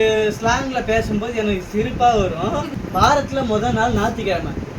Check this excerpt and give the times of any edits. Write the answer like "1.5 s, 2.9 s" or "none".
2.7 s